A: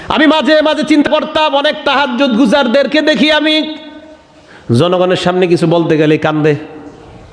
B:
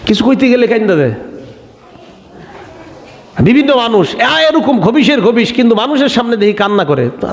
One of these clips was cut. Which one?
A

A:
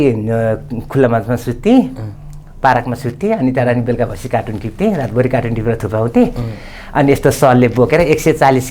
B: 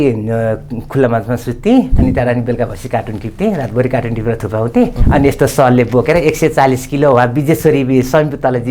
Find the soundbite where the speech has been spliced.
B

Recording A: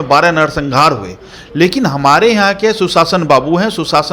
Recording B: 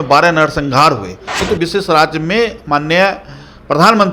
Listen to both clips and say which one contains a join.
B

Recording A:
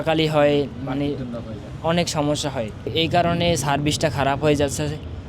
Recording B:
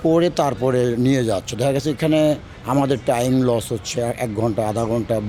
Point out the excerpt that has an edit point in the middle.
A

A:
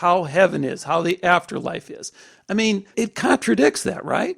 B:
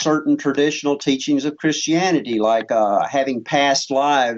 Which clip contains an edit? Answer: A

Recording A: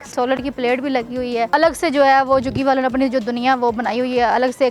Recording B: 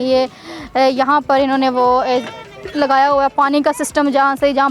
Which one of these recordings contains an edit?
A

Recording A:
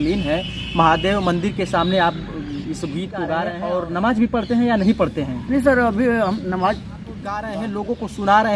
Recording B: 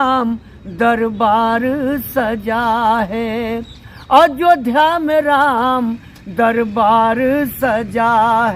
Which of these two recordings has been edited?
A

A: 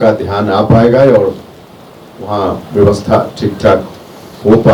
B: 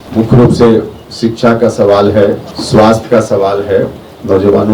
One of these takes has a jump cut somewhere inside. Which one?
B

